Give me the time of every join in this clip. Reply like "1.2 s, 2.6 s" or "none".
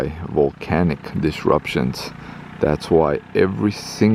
none